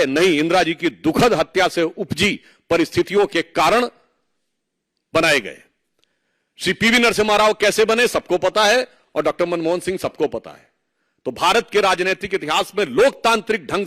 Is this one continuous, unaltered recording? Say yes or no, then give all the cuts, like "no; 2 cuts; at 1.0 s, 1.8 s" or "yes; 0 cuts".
yes; 0 cuts